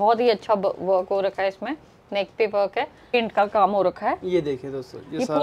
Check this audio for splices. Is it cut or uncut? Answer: cut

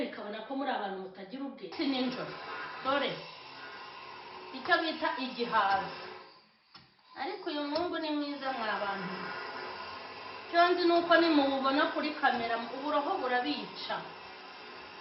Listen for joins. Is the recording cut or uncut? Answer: cut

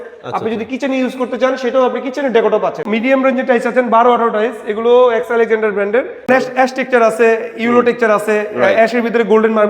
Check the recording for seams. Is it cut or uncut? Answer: cut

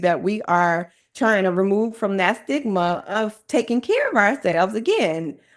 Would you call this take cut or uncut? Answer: uncut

